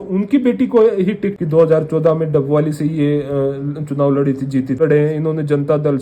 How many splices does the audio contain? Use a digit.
2